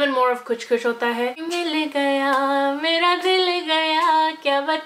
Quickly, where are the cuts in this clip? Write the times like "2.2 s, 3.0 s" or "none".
1.4 s